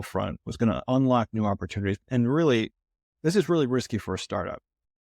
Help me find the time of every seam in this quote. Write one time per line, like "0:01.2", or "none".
0:02.0